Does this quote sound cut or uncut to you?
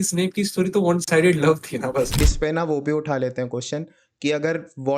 cut